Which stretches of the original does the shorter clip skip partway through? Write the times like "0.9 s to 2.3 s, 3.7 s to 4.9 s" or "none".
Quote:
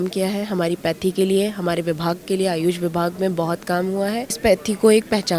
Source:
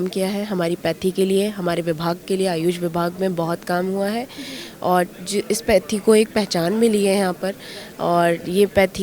4.4 s to 5.6 s

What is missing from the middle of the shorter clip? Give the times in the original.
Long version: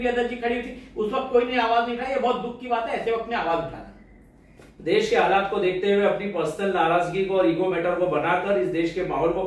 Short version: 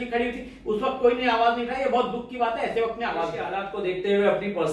3.9 s to 5.4 s

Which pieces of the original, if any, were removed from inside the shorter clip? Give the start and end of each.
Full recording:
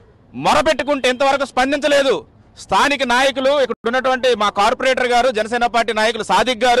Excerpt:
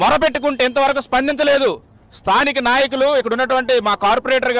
3.7 s to 3.8 s

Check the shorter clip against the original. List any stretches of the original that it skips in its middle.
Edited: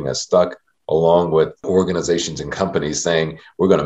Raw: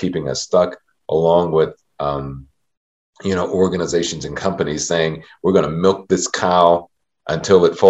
1.8 s to 3.5 s

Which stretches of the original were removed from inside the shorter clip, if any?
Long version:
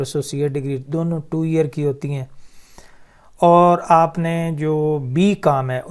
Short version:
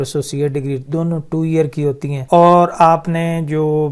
2.1 s to 3.2 s

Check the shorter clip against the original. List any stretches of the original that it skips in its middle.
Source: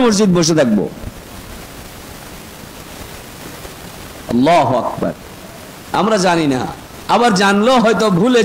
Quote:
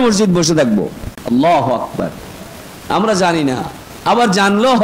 1.1 s to 4.1 s

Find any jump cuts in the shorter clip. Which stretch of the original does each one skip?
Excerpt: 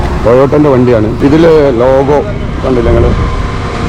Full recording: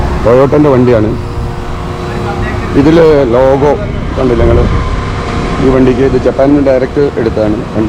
1.1 s to 2.7 s

